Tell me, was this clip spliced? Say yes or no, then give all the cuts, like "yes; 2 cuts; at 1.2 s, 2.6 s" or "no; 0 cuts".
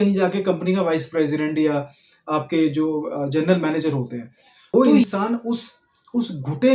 yes; 1 cut; at 4.7 s